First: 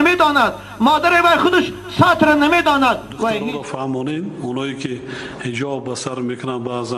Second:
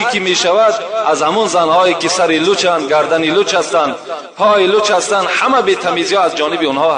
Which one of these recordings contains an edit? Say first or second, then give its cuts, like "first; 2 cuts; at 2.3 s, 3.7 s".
first; 1 cut; at 3.4 s